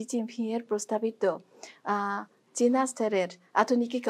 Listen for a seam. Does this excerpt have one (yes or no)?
no